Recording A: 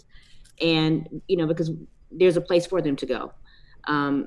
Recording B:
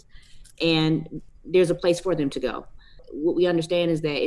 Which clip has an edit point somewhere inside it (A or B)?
B